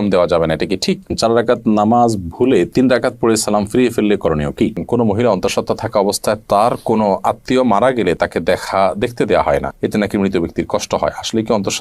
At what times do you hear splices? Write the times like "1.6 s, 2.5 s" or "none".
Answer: 1.1 s, 4.8 s